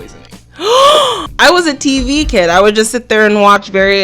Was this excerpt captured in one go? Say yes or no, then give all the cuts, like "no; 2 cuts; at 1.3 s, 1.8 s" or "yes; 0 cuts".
no; 1 cut; at 1.1 s